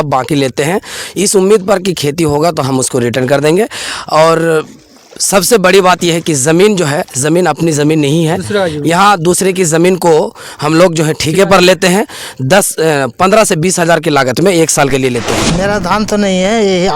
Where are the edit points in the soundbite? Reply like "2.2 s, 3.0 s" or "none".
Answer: 15.4 s